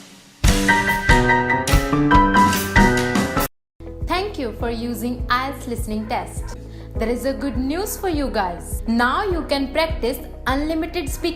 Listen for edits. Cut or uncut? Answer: cut